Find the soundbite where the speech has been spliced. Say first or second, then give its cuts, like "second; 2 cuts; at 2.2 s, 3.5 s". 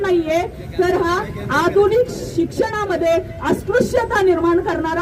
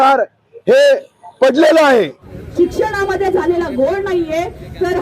second; 1 cut; at 2.2 s